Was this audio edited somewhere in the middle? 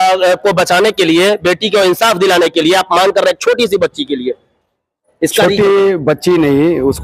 no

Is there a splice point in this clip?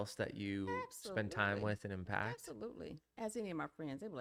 no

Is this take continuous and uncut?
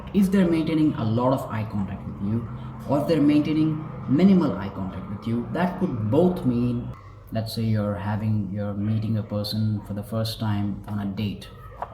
no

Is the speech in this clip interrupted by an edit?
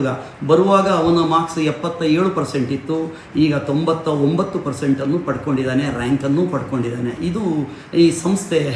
no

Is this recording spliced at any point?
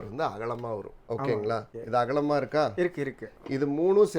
yes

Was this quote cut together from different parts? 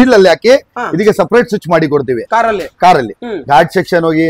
no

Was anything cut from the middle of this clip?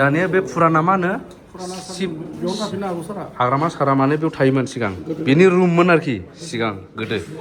no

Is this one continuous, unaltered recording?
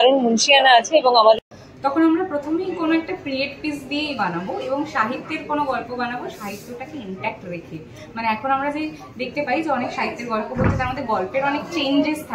no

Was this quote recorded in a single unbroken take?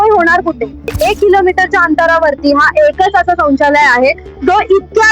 no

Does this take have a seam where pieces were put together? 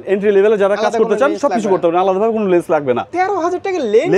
yes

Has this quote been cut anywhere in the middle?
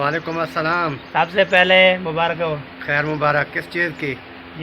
no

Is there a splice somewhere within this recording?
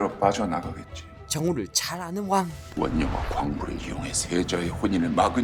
no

